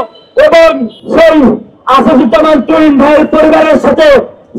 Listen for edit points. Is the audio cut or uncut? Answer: cut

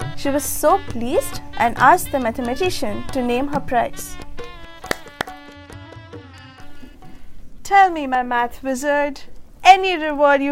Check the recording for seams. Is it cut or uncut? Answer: cut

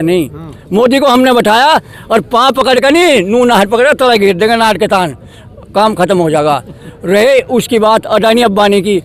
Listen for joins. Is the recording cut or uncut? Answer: uncut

